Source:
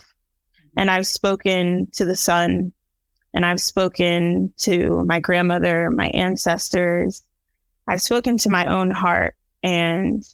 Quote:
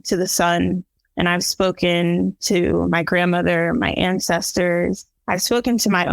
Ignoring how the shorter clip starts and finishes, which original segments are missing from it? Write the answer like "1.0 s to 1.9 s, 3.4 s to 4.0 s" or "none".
2.9 s to 3.1 s, 7.3 s to 7.7 s

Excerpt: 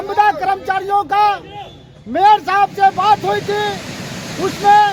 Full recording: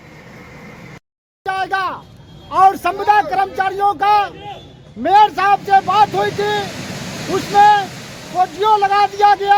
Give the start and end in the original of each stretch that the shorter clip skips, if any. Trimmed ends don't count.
none

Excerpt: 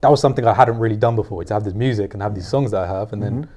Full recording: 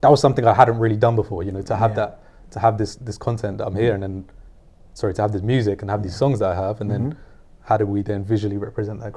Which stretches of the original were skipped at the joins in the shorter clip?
1.5 s to 5.1 s

